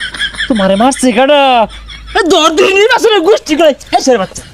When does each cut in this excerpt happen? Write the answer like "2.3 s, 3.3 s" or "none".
none